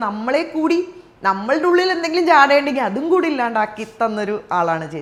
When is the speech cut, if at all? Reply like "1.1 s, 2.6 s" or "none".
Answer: none